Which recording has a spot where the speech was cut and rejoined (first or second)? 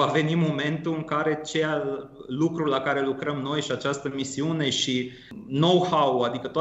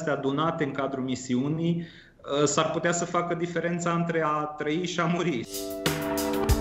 first